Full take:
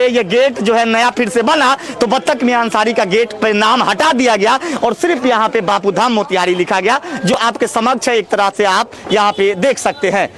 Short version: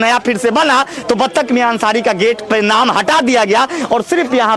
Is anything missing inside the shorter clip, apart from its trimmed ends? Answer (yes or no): no